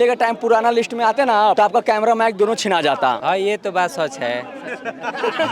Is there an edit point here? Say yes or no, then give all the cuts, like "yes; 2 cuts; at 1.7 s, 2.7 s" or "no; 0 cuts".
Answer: yes; 2 cuts; at 1.6 s, 3.2 s